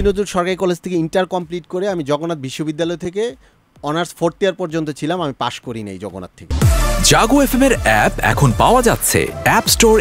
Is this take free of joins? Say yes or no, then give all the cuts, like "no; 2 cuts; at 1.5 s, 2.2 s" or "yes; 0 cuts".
no; 1 cut; at 6.4 s